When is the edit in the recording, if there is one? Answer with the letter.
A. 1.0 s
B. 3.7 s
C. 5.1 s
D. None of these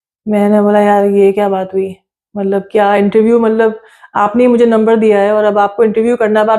D